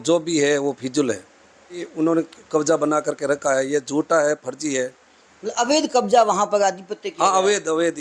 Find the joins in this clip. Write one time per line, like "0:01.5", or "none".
0:01.9